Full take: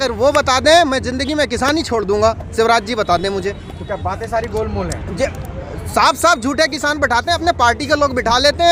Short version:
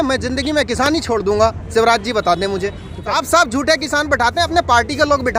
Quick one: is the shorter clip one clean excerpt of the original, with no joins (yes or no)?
no